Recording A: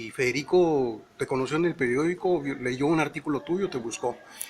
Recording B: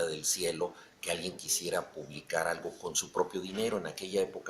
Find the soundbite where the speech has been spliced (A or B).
A